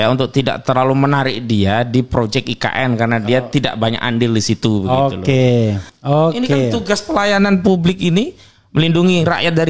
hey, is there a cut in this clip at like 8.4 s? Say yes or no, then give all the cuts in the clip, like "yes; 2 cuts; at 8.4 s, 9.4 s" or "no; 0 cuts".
no; 1 cut; at 5.9 s